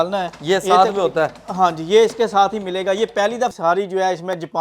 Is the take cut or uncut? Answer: cut